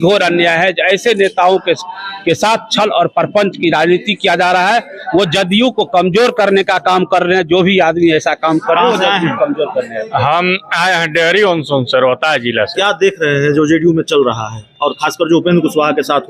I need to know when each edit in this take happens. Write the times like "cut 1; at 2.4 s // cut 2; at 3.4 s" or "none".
none